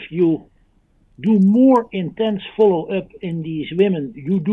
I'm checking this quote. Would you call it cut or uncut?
uncut